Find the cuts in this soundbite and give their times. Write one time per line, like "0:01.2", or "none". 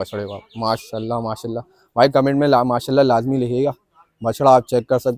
none